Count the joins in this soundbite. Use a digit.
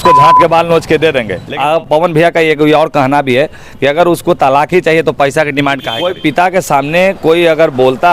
2